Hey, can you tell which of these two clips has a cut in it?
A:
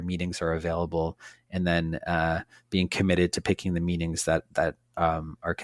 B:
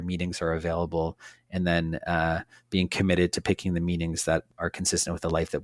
B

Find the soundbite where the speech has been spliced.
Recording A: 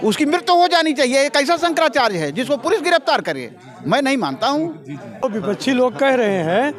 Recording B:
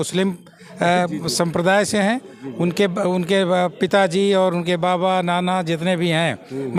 A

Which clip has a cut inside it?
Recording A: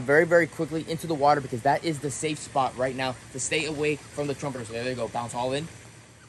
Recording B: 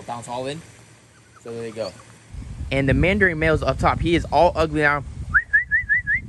B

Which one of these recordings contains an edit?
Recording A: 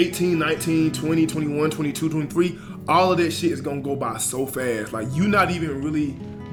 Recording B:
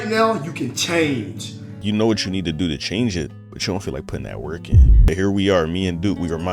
B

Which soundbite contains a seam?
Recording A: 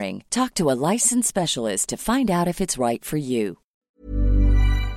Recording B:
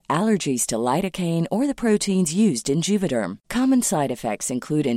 A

